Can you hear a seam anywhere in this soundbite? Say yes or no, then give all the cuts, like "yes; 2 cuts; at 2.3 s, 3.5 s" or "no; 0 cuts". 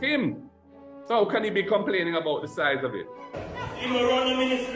yes; 1 cut; at 3.4 s